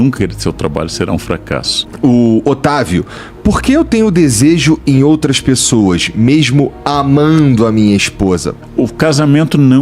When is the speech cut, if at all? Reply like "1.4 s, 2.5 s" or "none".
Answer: 1.8 s, 8.6 s